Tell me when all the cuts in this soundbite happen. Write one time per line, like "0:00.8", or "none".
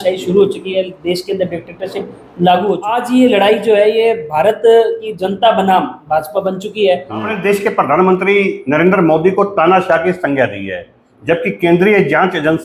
0:03.0
0:07.3